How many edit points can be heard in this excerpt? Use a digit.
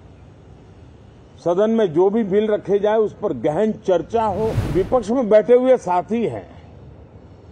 1